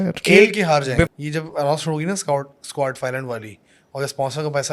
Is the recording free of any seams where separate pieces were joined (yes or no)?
no